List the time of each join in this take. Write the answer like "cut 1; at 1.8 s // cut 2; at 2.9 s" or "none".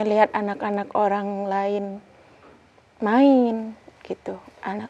none